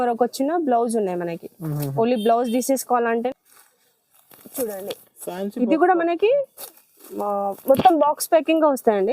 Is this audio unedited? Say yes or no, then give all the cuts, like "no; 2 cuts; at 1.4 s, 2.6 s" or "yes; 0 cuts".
no; 1 cut; at 3.3 s